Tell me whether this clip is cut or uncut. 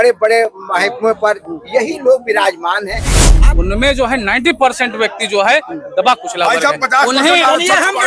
cut